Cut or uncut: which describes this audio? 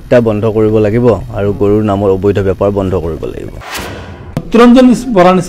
cut